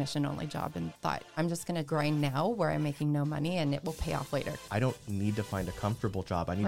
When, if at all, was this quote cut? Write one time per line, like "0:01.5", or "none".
0:01.7
0:04.6

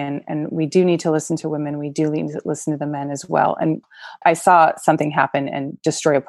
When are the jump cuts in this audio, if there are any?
0:04.1

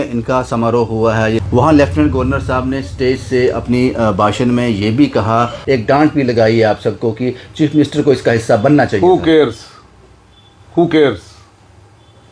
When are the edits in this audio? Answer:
0:01.4
0:05.6

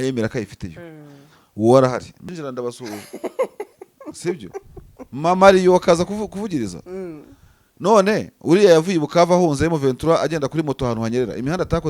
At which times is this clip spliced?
0:02.3

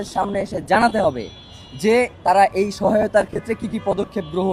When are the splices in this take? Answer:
none

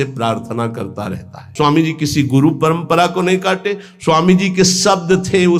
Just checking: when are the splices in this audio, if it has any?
0:01.4

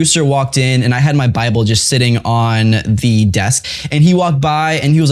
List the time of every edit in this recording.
0:03.6

